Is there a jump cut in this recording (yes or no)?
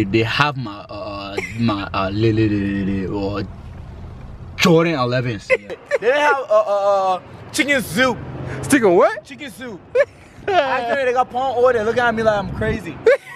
yes